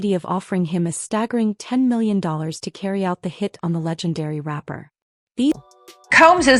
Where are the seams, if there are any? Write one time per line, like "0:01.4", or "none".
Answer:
none